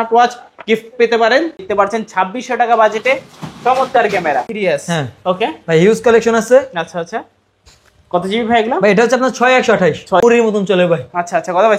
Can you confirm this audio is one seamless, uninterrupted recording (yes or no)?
no